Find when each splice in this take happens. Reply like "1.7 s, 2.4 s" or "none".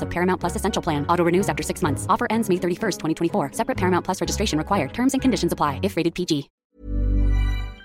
6.6 s